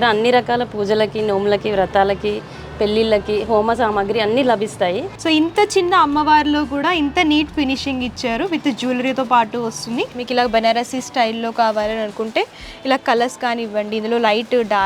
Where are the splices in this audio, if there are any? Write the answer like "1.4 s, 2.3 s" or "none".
5.1 s, 10.1 s